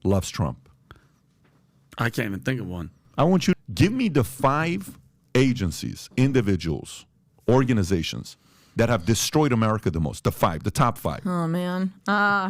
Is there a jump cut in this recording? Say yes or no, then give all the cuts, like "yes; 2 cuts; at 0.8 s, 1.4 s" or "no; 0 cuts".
yes; 1 cut; at 3.5 s